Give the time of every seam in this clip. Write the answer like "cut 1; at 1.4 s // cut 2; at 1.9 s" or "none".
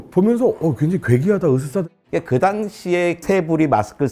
cut 1; at 1.8 s